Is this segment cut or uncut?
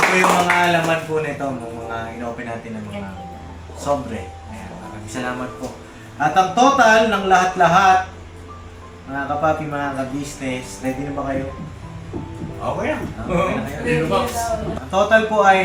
cut